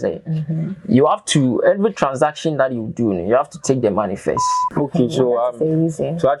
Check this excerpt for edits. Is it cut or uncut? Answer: cut